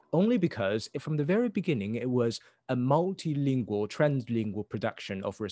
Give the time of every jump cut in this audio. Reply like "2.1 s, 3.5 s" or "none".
0.9 s